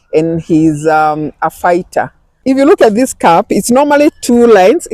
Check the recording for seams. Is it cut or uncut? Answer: cut